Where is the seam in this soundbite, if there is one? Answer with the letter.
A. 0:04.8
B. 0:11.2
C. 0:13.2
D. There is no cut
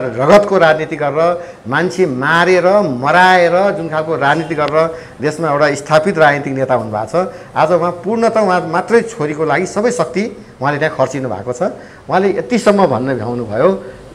D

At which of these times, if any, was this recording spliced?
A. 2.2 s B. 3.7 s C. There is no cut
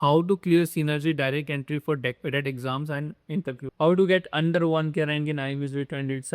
B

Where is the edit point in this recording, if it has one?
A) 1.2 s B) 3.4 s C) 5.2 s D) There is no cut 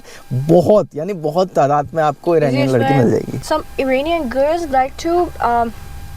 B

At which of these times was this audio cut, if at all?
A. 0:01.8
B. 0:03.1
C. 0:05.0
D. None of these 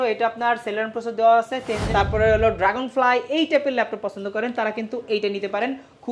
A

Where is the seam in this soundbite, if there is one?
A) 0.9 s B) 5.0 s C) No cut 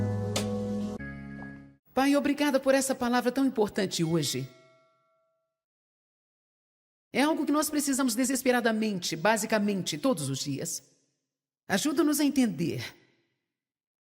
A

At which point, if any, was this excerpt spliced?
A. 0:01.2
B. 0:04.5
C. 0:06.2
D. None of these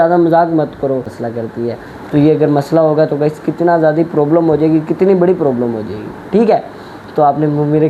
A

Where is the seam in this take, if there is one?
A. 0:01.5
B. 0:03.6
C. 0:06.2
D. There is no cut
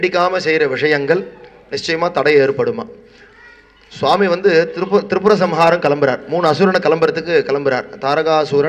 D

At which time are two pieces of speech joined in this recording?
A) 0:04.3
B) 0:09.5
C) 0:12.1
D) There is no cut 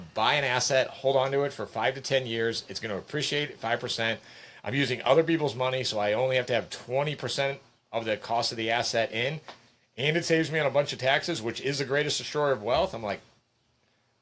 D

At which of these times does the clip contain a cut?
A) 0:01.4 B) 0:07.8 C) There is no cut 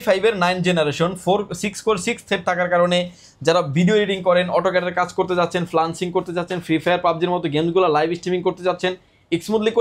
C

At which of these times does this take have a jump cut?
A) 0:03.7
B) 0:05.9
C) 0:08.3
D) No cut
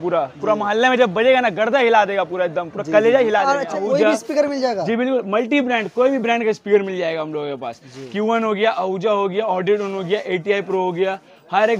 A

